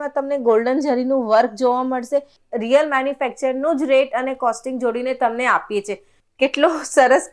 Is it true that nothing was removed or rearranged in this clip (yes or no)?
no